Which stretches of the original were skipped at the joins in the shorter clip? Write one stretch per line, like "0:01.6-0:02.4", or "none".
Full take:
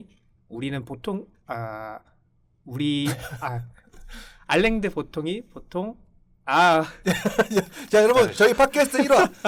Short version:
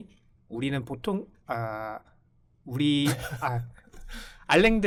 none